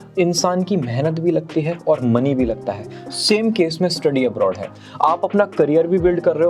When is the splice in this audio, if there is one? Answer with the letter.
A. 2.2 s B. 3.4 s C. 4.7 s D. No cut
D